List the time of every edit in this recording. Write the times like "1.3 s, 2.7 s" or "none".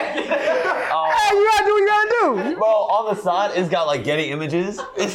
2.5 s